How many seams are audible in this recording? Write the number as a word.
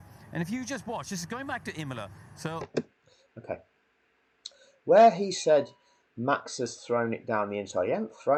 zero